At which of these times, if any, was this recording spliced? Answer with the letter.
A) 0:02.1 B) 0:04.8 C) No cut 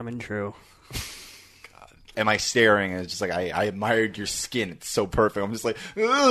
A